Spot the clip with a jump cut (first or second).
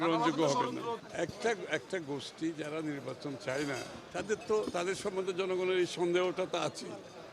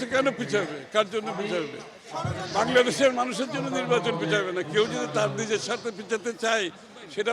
first